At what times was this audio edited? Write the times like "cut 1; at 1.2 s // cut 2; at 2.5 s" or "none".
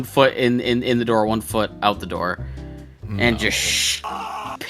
none